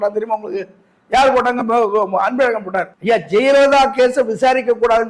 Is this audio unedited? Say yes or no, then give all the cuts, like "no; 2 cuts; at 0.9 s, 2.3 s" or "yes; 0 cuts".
no; 1 cut; at 2.9 s